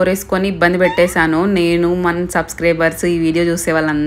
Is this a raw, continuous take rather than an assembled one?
yes; 0 cuts

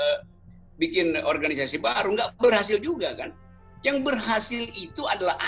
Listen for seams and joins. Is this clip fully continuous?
yes; 0 cuts

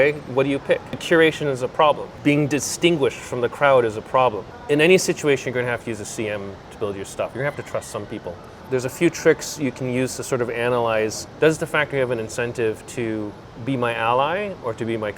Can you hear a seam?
yes; 5 cuts; at 1.0 s, 2.1 s, 4.5 s, 7.3 s, 8.6 s

